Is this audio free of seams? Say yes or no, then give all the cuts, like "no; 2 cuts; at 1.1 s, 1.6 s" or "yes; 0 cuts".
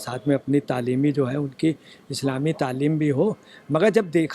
yes; 0 cuts